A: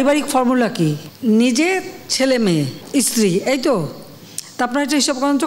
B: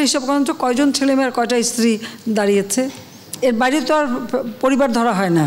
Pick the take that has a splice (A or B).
A